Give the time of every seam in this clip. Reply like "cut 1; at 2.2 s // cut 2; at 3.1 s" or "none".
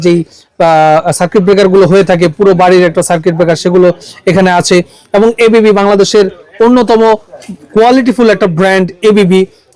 none